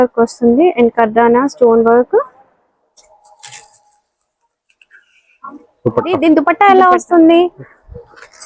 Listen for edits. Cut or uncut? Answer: cut